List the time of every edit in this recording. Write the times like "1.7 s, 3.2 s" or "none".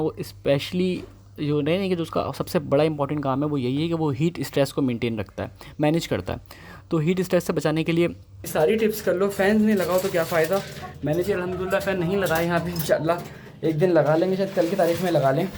8.4 s